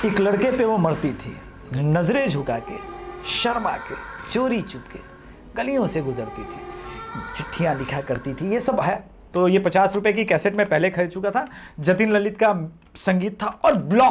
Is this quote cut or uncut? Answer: cut